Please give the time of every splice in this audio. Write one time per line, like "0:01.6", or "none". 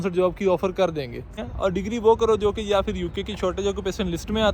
0:01.4